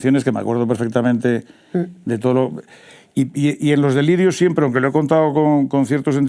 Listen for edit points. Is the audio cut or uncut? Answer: uncut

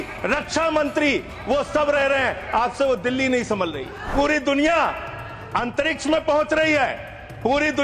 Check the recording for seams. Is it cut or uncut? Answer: cut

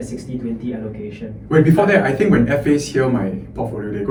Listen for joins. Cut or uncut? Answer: uncut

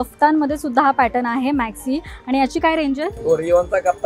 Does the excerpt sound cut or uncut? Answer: uncut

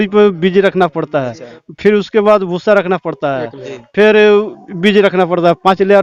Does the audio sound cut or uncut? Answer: uncut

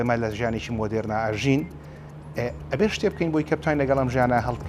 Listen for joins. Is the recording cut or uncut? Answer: uncut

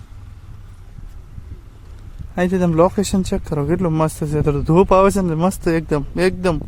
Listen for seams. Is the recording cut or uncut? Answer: uncut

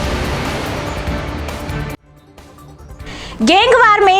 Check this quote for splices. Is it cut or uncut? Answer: cut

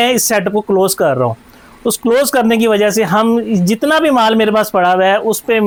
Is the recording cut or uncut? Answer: uncut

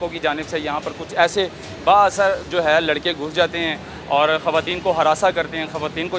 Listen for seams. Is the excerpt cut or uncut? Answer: uncut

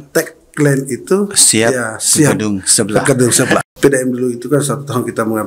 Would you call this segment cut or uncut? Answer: cut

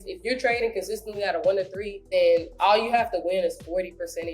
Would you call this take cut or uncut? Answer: cut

